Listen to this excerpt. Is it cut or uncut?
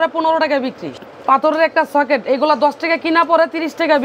cut